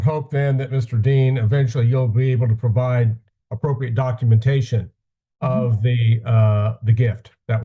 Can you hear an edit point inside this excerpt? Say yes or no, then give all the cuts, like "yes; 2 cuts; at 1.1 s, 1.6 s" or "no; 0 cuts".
no; 0 cuts